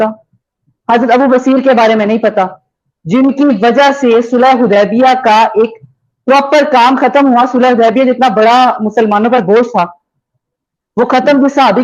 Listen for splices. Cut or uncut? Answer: uncut